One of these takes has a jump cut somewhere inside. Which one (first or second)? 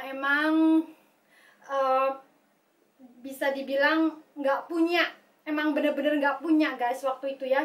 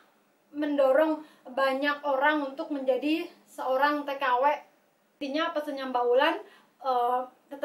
second